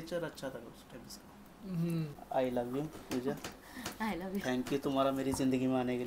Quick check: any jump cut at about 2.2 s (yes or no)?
yes